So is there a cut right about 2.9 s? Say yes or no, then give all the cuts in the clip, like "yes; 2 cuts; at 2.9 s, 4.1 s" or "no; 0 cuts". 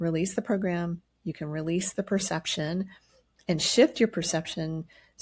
no; 0 cuts